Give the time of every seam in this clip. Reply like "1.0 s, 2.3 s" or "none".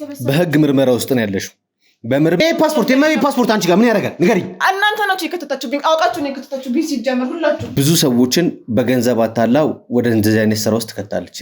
2.4 s, 7.7 s